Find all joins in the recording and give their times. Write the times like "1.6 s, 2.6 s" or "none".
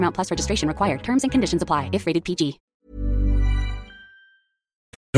none